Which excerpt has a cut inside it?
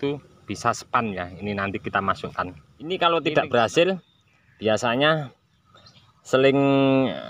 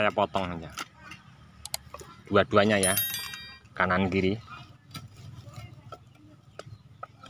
first; 1 cut; at 3.0 s

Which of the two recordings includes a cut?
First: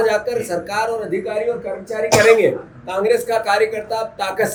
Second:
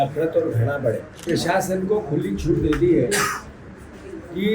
second; 1 cut; at 1.2 s

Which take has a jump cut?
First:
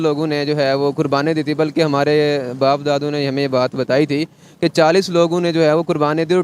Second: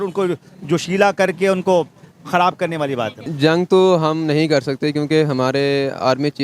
second; 1 cut; at 3.3 s

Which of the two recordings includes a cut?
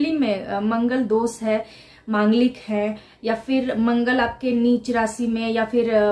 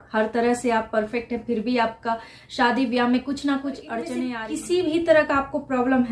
second; 1 cut; at 4.3 s

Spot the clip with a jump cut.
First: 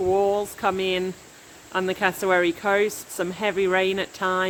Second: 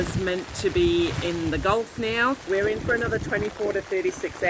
second; 1 cut; at 2.5 s

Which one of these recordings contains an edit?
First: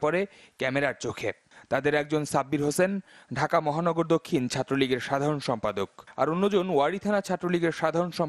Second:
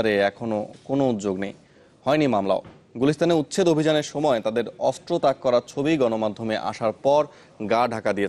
first; 1 cut; at 1.9 s

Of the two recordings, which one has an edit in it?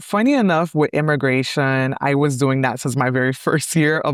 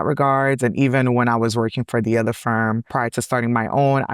second; 1 cut; at 2.9 s

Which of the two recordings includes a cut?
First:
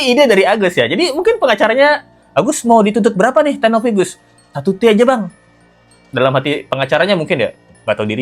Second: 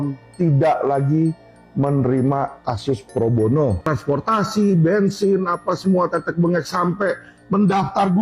second; 1 cut; at 3.9 s

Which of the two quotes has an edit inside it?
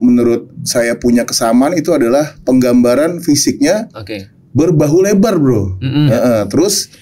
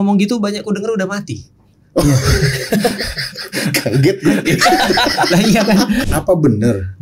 second; 1 cut; at 6.0 s

